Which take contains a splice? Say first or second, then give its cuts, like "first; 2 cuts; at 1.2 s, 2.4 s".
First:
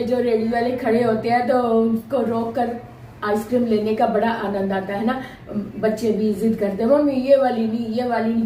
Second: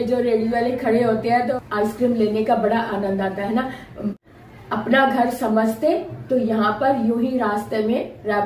second; 2 cuts; at 1.5 s, 4.2 s